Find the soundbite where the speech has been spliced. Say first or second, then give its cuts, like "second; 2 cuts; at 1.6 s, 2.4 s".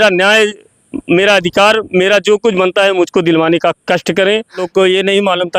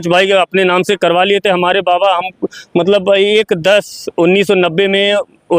first; 1 cut; at 4.7 s